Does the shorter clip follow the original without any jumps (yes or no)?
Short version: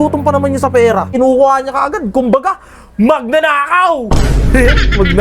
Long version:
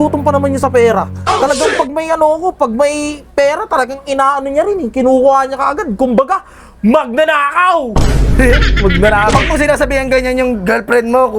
no